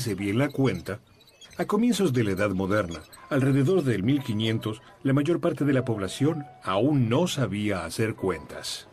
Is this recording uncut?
yes; 0 cuts

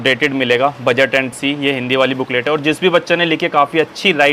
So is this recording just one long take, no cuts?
no; 1 cut; at 1.3 s

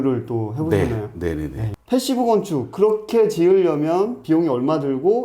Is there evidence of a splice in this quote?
yes; 1 cut; at 1.7 s

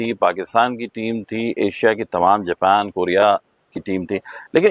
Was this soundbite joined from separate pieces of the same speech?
no; 0 cuts

